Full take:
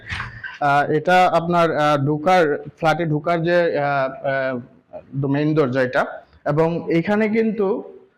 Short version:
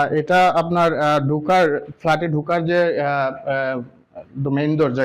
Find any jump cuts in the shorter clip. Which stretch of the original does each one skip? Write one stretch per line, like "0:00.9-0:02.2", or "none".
none

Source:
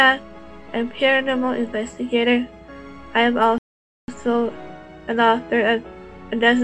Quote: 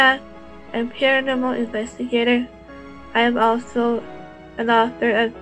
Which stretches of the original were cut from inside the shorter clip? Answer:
0:03.7-0:04.2

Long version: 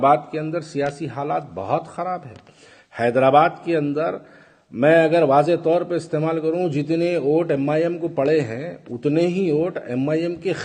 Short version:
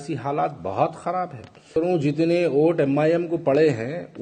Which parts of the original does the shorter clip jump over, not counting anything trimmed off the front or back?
0:02.6-0:06.4

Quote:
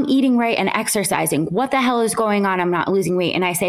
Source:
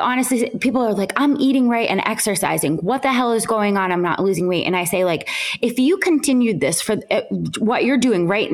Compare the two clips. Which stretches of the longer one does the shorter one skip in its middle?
none

